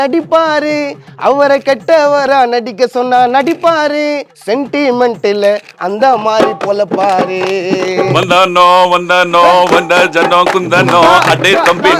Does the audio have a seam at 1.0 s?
no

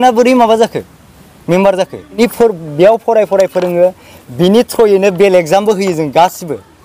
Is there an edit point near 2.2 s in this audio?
yes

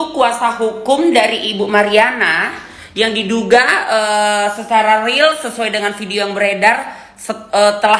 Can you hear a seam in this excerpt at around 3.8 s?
no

